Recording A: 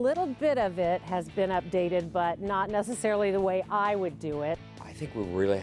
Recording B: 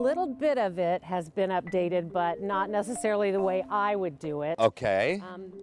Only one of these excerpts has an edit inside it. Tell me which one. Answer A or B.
A